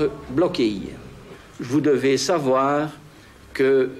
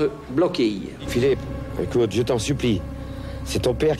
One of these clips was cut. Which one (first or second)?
second